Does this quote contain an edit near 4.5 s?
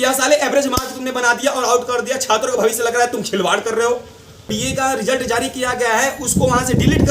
yes; 1 cut; at 4.5 s

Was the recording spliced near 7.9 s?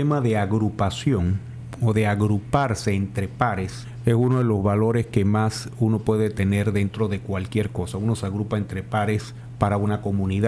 no; 2 cuts; at 3.8 s, 9.4 s

